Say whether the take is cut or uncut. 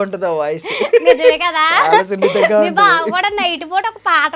uncut